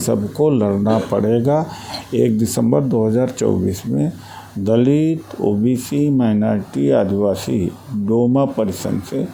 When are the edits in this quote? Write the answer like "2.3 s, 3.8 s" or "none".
none